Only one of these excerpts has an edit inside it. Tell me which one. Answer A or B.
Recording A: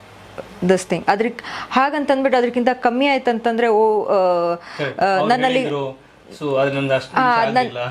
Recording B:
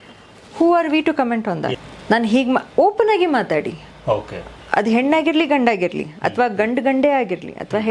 B